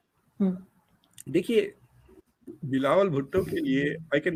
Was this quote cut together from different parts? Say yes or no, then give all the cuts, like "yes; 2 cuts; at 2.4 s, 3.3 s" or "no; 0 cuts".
no; 0 cuts